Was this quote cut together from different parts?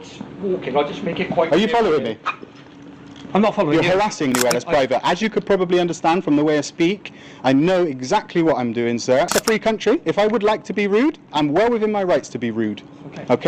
yes; 2 cuts; at 4.3 s, 9.3 s

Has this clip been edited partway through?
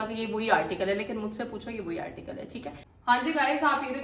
yes; 1 cut; at 2.9 s

